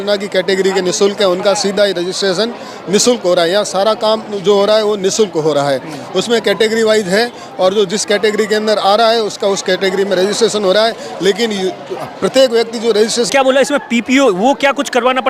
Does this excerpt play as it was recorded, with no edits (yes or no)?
no